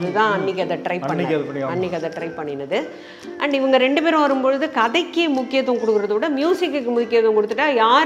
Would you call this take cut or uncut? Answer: uncut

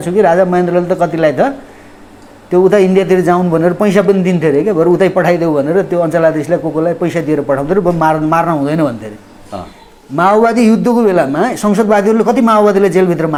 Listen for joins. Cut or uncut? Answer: uncut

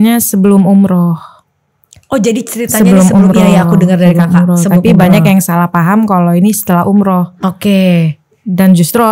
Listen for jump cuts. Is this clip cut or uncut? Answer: uncut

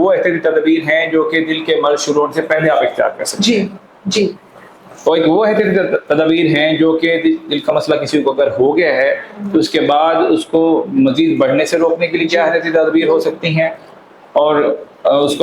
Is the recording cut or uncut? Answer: uncut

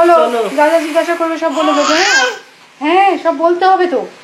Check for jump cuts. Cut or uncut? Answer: uncut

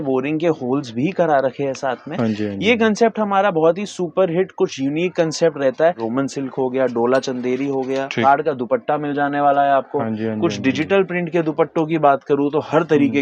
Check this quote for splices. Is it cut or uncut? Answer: cut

